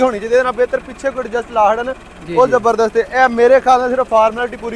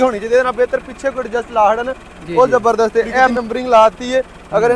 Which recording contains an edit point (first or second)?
second